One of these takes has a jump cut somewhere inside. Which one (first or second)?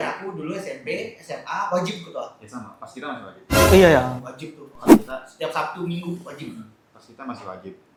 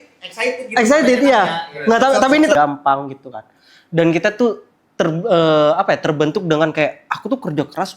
second